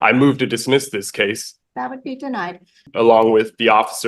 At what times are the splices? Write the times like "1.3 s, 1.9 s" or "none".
1.5 s, 2.9 s